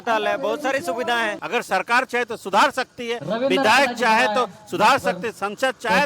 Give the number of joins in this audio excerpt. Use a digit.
1